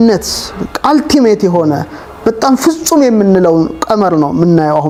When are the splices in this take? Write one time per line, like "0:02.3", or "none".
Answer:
none